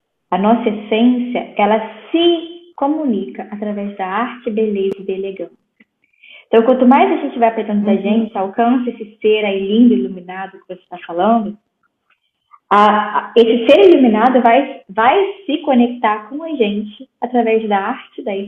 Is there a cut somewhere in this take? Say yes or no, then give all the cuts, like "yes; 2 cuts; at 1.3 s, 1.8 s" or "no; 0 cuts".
no; 0 cuts